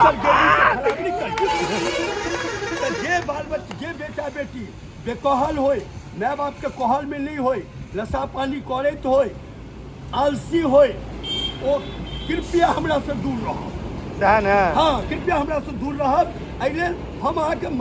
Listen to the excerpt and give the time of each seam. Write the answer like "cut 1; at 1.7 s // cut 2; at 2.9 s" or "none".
none